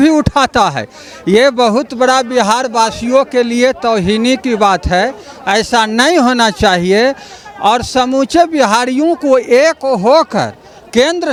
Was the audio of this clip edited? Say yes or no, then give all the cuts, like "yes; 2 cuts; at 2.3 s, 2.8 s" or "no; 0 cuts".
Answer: no; 0 cuts